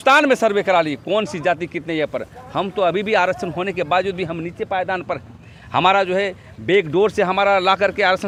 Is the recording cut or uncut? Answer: uncut